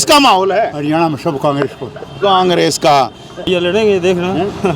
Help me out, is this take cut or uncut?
cut